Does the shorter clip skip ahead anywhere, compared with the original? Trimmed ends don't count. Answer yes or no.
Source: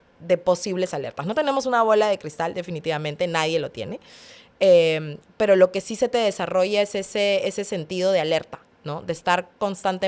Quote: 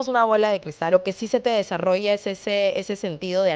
yes